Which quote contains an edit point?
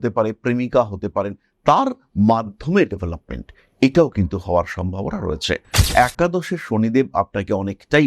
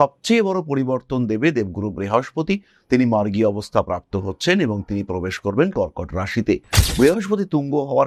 first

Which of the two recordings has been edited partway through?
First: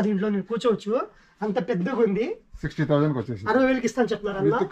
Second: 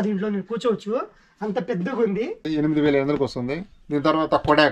second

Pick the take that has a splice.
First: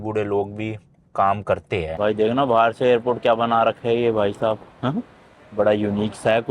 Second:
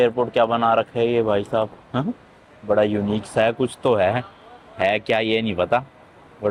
first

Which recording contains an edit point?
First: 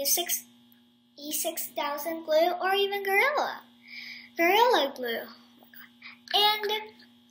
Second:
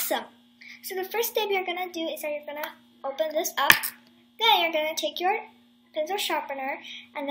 second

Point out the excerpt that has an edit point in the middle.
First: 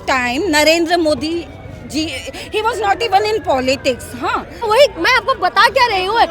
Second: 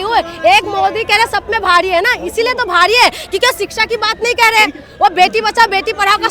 first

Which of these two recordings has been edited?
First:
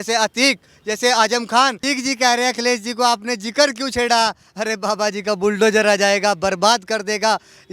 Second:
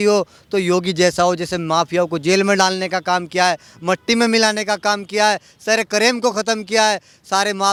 first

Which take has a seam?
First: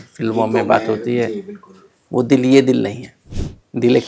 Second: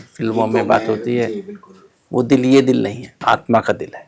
first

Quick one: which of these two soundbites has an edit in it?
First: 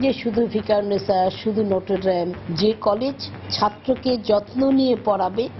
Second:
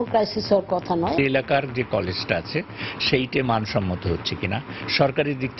second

